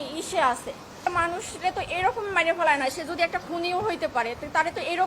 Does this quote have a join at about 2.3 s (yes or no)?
no